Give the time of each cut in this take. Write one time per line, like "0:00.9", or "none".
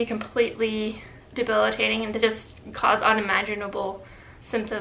0:02.2